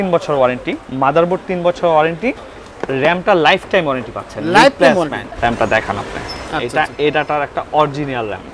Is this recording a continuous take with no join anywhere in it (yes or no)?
yes